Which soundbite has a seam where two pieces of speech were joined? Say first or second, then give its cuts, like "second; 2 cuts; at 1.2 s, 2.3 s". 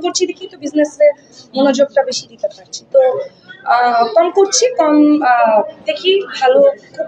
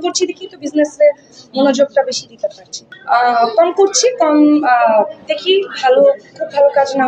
second; 1 cut; at 2.7 s